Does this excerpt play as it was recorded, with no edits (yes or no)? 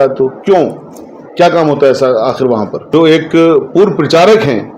no